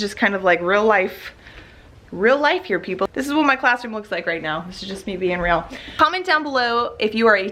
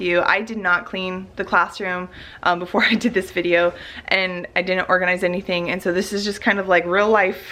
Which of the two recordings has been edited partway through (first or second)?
first